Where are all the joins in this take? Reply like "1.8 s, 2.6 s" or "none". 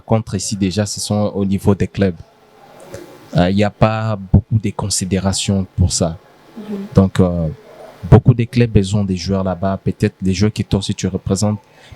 none